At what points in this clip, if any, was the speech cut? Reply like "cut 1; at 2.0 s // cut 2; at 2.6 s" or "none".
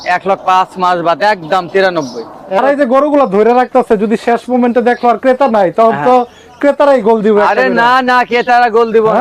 cut 1; at 2.6 s